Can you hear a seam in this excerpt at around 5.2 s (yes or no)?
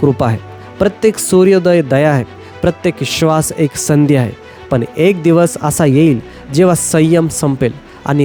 no